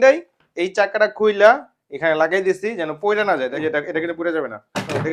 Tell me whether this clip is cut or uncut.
uncut